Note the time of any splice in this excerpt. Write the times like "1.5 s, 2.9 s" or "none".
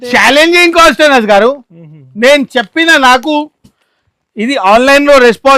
none